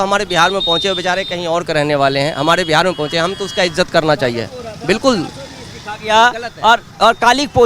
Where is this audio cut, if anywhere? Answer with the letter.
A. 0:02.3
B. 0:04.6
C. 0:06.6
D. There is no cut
D